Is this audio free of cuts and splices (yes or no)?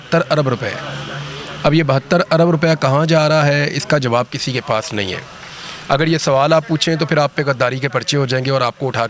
yes